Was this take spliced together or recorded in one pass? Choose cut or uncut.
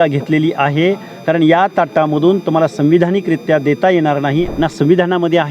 cut